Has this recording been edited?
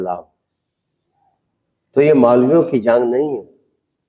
no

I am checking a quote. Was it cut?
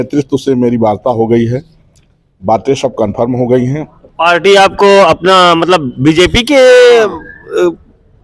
no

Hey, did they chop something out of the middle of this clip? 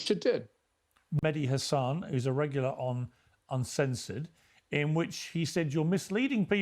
yes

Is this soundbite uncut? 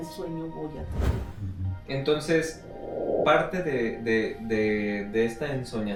yes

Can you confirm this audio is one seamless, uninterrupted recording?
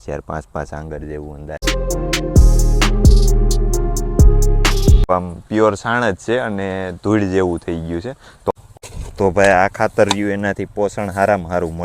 no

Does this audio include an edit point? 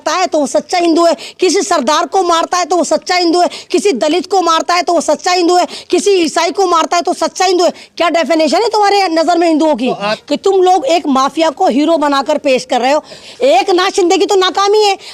yes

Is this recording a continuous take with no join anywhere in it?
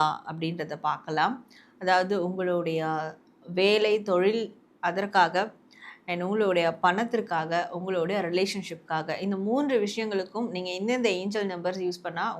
yes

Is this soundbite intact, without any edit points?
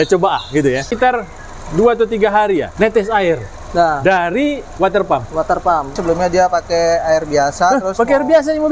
no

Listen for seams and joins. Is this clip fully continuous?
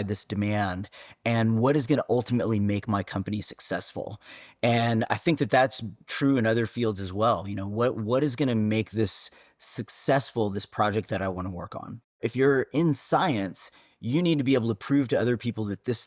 no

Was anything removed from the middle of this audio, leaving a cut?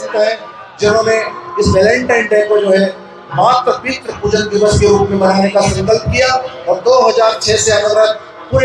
no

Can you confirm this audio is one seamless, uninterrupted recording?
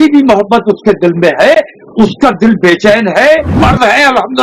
no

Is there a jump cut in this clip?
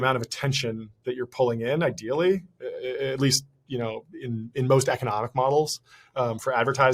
no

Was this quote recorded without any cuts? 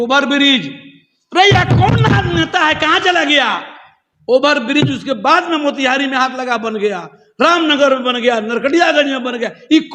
yes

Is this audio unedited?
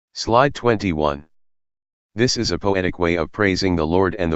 no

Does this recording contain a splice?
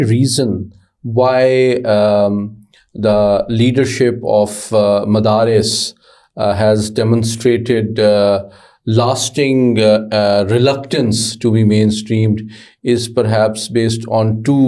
no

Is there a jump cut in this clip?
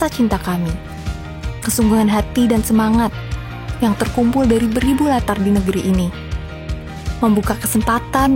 no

